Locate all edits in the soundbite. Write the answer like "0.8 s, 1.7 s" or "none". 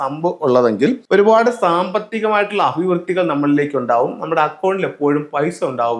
1.0 s